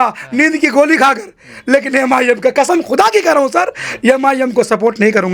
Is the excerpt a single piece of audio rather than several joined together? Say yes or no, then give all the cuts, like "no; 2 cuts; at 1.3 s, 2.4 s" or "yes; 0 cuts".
yes; 0 cuts